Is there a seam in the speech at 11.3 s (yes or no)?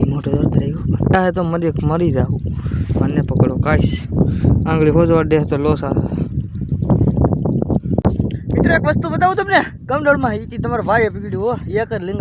no